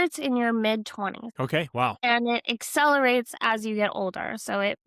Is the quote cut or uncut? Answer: cut